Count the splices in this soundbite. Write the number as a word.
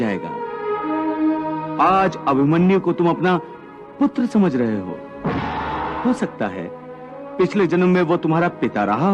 one